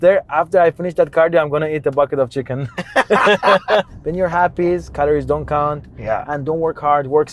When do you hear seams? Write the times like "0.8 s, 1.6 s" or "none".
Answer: 3.9 s